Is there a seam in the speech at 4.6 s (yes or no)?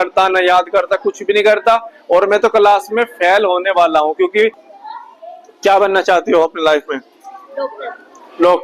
yes